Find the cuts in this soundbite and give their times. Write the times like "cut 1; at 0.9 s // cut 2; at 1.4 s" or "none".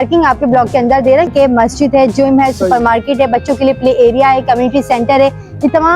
cut 1; at 1.3 s